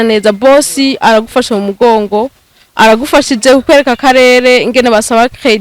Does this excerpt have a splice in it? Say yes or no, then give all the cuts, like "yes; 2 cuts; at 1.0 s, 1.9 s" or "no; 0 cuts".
no; 0 cuts